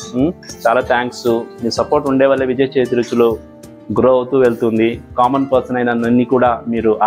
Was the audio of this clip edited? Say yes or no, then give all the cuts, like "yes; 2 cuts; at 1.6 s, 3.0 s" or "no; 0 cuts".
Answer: no; 0 cuts